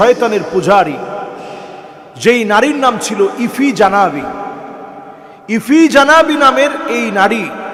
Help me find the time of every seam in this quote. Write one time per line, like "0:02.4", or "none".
none